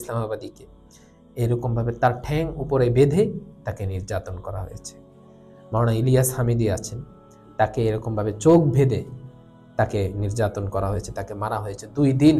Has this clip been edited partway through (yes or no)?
no